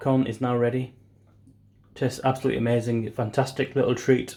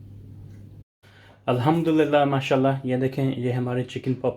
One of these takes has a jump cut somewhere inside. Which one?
second; 1 cut; at 0.9 s

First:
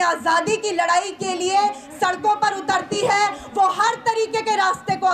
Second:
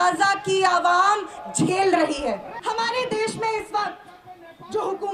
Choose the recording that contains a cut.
second; 1 cut; at 2.5 s

